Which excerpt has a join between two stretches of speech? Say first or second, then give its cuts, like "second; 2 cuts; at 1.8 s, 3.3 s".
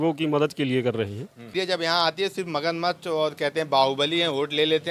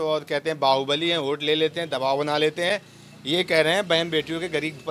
first; 1 cut; at 1.5 s